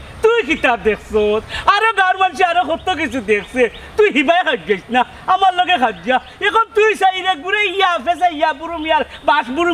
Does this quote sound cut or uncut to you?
uncut